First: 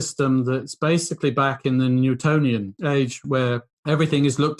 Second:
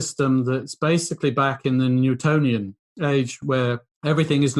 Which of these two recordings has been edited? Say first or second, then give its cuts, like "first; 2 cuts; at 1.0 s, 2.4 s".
first; 1 cut; at 2.7 s